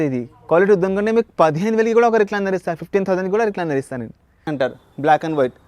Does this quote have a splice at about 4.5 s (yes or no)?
yes